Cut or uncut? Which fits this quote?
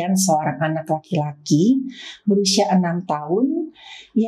uncut